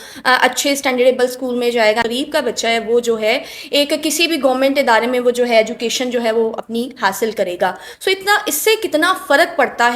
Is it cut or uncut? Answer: cut